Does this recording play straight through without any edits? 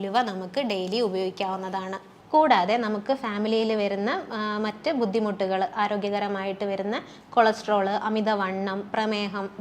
no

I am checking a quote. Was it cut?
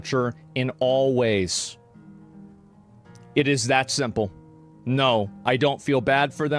yes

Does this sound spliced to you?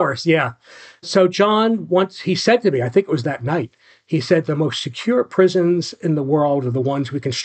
yes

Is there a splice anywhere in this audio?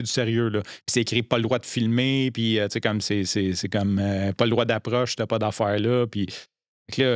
no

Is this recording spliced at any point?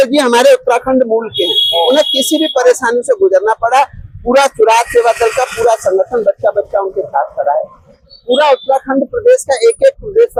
no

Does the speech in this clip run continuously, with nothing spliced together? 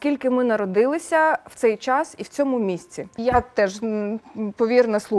no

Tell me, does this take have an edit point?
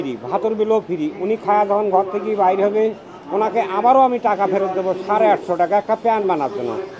no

